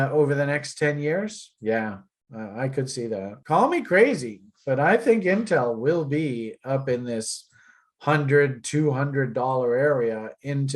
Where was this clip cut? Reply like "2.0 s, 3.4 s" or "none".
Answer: 3.4 s